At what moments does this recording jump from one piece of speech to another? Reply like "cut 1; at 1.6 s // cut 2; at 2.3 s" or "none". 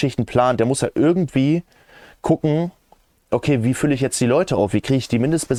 none